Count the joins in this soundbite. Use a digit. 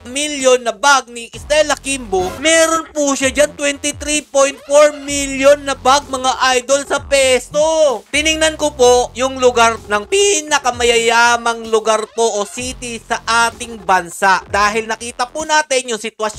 3